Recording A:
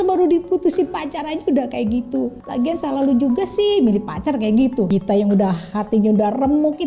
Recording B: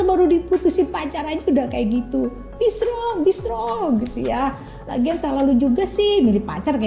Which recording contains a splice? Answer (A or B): A